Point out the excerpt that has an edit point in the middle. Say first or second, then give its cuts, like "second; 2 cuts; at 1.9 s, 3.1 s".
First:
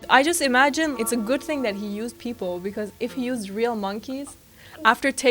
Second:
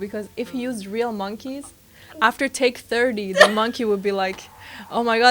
first; 1 cut; at 0.9 s